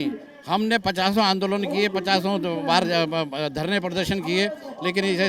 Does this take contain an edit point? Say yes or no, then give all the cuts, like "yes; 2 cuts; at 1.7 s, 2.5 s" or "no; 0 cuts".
no; 0 cuts